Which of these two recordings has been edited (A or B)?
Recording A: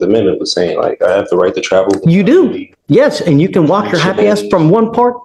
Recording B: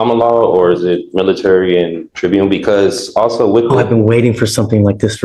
B